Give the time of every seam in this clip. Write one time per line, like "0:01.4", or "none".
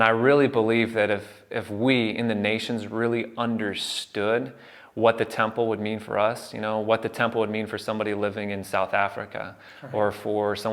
none